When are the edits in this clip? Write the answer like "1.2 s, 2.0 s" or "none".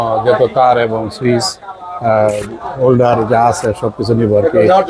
none